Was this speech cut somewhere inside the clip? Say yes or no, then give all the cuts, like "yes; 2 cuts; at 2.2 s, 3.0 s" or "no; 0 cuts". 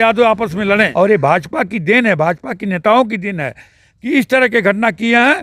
yes; 1 cut; at 0.9 s